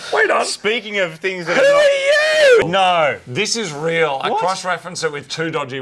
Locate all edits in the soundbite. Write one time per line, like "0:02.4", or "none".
0:02.6

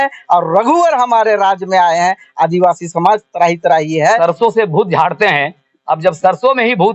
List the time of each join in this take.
0:04.2

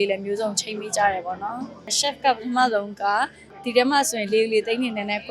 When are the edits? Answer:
0:01.9
0:03.6

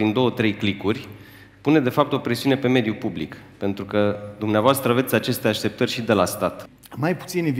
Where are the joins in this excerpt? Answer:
0:06.7

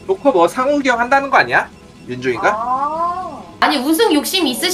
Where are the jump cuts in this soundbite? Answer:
0:03.6

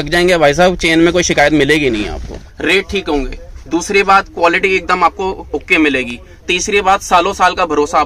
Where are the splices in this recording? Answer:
0:02.4

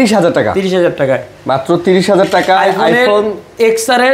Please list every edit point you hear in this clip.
none

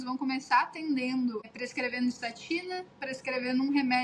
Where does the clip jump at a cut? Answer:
0:01.5

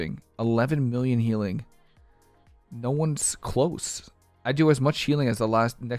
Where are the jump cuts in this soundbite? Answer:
none

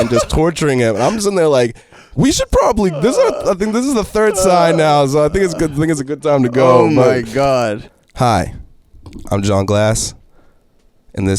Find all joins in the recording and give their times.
0:07.7

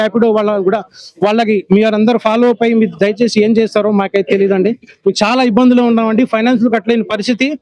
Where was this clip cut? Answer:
none

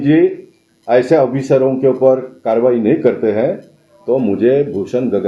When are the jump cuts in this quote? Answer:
none

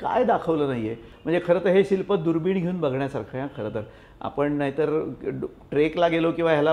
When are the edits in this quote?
0:01.1

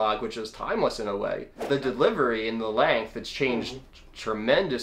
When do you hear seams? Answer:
0:01.5

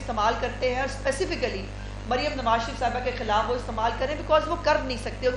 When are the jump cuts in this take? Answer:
none

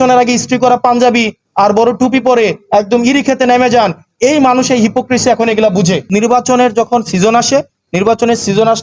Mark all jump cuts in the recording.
0:06.0

